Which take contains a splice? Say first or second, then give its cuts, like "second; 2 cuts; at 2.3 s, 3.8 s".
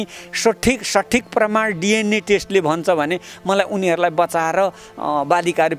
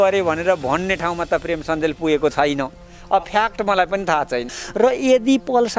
second; 1 cut; at 4.5 s